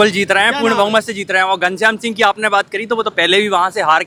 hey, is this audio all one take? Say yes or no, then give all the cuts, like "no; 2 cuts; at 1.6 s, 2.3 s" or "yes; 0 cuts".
yes; 0 cuts